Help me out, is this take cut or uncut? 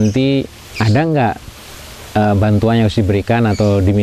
uncut